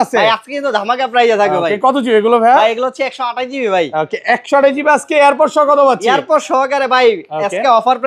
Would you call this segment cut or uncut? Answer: uncut